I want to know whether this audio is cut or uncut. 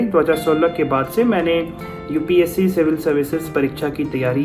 uncut